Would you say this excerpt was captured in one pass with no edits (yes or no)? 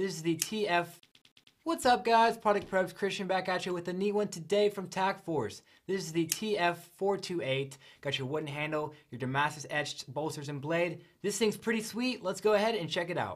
no